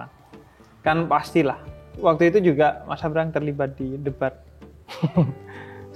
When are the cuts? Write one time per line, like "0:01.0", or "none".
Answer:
none